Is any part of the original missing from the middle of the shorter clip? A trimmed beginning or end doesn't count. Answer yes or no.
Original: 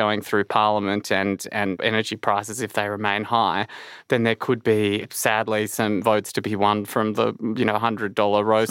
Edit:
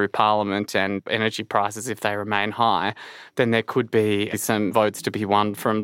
yes